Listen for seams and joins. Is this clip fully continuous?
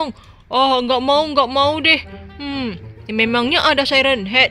yes; 0 cuts

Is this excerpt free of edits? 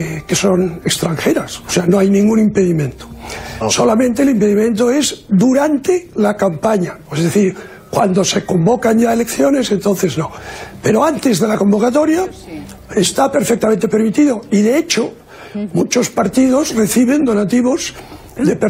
yes; 0 cuts

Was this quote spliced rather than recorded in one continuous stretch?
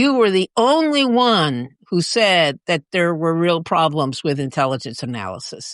no; 0 cuts

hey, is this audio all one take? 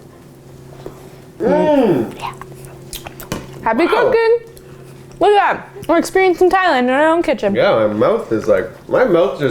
no; 1 cut; at 1.3 s

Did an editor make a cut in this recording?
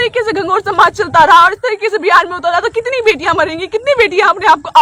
no; 0 cuts

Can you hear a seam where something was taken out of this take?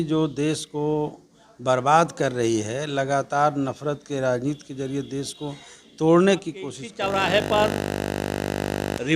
yes; 1 cut; at 6.9 s

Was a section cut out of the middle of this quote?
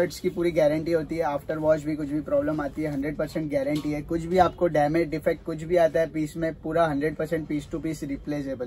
no; 0 cuts

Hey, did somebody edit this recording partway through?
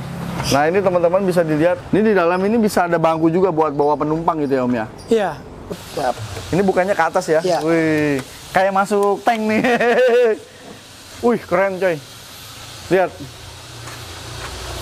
yes; 1 cut; at 5.7 s

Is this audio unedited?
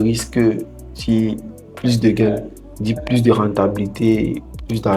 yes; 0 cuts

